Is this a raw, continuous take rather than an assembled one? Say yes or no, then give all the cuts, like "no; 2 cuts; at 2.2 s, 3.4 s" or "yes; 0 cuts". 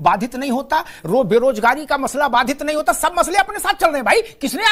yes; 0 cuts